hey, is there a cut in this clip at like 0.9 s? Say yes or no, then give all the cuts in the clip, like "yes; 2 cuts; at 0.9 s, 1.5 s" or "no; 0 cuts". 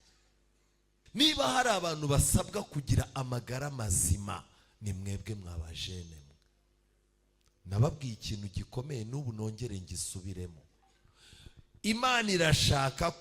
yes; 1 cut; at 0.9 s